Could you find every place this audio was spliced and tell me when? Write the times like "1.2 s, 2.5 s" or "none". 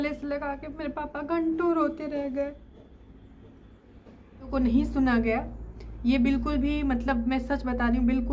4.5 s